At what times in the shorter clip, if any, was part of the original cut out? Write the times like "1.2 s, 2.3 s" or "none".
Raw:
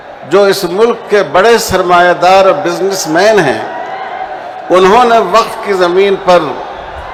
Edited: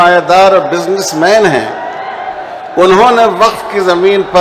none